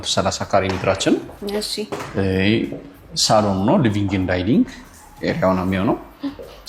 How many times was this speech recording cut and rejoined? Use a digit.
0